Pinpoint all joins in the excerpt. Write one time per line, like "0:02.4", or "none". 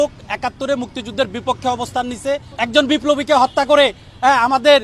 0:02.5